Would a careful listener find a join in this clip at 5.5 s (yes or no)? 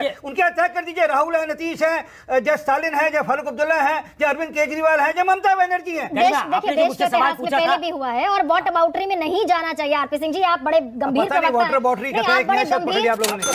no